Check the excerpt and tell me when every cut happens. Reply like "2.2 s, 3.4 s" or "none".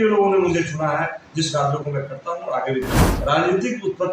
3.0 s

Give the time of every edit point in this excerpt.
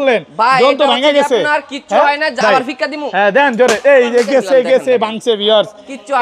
2.4 s

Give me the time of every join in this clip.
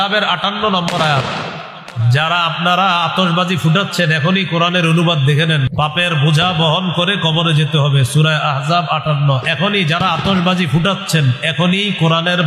5.7 s

